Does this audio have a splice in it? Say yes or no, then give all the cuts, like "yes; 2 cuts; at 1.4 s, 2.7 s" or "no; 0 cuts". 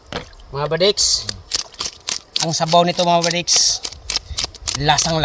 no; 0 cuts